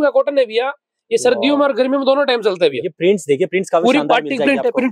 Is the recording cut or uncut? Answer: uncut